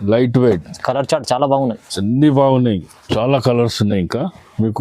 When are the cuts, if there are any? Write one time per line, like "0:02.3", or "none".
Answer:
0:02.9